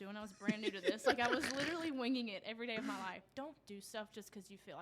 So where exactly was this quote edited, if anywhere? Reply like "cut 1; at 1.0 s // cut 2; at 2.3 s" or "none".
cut 1; at 3.2 s